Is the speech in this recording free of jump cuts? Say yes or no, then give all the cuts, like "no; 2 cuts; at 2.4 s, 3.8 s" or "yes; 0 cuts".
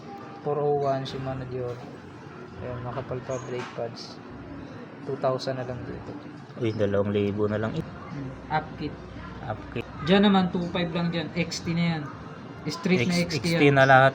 no; 2 cuts; at 7.8 s, 9.7 s